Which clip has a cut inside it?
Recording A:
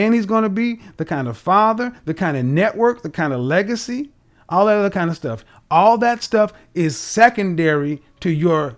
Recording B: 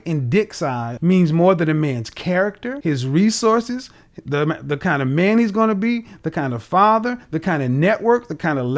B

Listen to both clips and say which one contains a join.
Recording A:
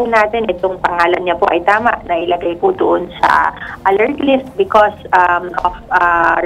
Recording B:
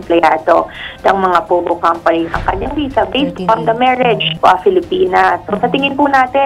B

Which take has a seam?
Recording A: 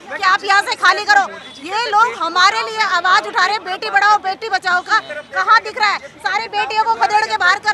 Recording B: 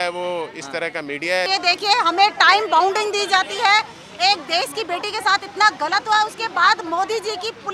B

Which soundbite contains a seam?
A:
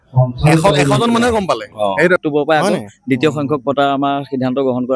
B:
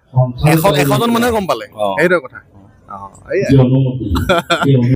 A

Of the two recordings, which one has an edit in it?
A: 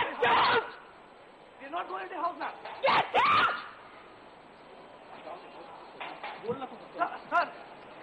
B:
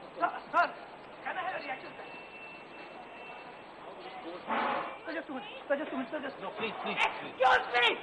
B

